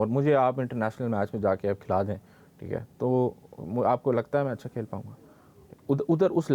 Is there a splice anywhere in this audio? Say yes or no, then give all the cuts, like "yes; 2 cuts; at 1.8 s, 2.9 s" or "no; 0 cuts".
no; 0 cuts